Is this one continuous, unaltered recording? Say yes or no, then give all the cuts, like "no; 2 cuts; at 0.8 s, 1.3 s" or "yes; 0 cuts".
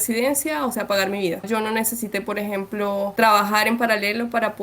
no; 2 cuts; at 1.5 s, 3.1 s